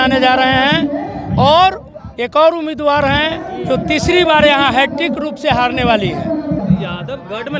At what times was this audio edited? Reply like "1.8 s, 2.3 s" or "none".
6.6 s

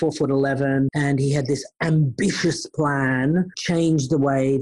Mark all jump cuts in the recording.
0.9 s

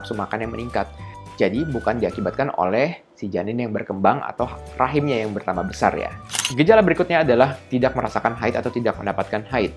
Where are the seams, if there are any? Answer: 6.2 s

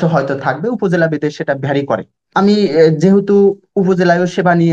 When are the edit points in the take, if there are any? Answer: 2.3 s

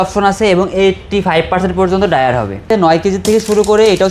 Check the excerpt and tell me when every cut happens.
2.7 s

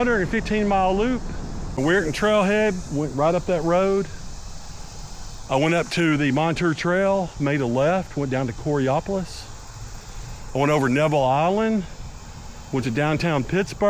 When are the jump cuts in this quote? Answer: 1.8 s

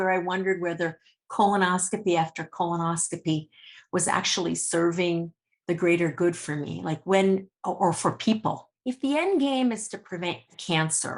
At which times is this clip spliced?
8.7 s

